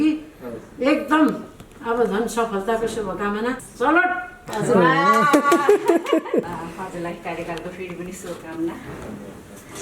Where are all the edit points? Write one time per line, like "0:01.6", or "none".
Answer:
0:03.7
0:06.5